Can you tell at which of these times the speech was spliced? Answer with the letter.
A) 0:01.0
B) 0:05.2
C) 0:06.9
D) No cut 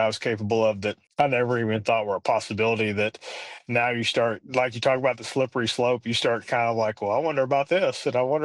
A